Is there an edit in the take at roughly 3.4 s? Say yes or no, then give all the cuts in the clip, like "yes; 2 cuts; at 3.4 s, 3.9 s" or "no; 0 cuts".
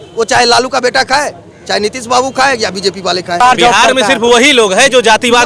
yes; 1 cut; at 3.4 s